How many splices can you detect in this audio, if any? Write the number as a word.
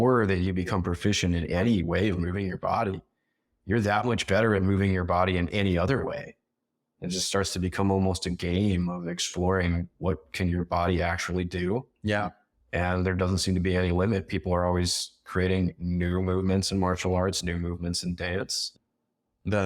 one